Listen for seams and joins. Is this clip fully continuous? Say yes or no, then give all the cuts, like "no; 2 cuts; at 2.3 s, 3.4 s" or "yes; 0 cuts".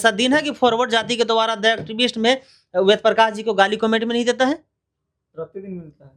yes; 0 cuts